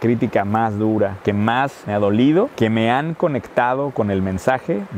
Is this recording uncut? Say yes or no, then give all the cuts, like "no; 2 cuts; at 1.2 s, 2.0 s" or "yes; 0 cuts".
yes; 0 cuts